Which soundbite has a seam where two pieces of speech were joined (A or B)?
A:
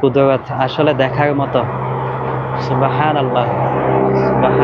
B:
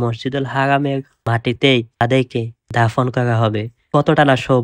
B